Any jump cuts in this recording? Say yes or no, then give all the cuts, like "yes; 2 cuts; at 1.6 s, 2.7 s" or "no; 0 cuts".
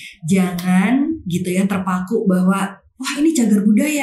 no; 0 cuts